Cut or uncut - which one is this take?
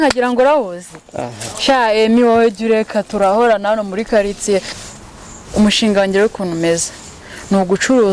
cut